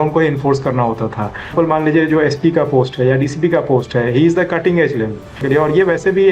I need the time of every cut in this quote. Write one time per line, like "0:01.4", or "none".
0:01.5
0:05.4